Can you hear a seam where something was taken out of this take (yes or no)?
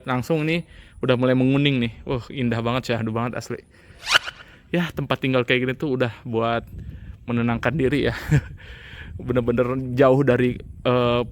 yes